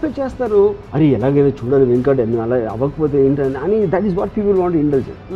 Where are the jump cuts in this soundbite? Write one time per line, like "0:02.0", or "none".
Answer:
none